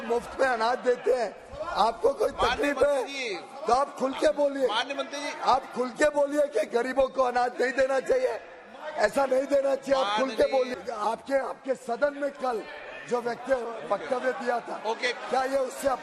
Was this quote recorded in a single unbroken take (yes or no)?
no